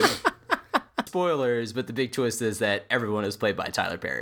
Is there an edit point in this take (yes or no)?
yes